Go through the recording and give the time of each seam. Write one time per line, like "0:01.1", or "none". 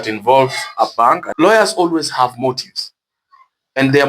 0:01.3